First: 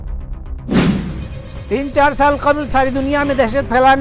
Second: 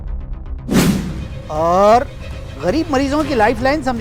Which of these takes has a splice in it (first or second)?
second